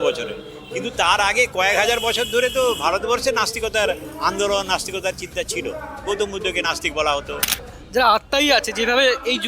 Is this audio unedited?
no; 1 cut; at 7.9 s

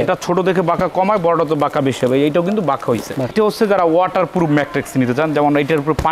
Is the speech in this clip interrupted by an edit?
yes; 1 cut; at 3.3 s

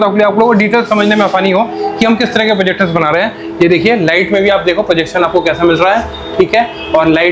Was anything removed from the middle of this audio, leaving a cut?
no; 0 cuts

